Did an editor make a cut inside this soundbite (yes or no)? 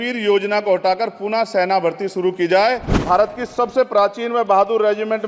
yes